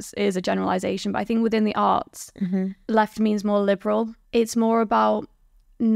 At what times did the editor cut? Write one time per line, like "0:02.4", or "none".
0:02.8
0:04.2